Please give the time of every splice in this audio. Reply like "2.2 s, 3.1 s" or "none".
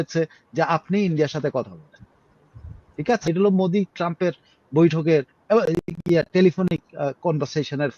3.3 s